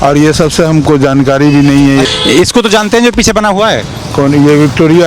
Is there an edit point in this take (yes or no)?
yes